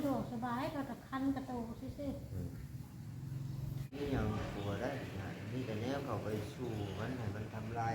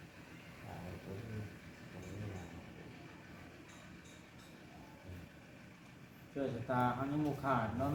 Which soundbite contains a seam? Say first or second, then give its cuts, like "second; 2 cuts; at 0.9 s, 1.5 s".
first; 1 cut; at 4.0 s